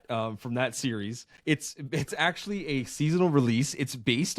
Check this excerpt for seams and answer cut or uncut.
cut